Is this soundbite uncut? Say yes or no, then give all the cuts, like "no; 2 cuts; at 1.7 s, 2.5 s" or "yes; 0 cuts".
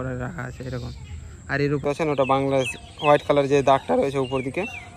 no; 1 cut; at 1.8 s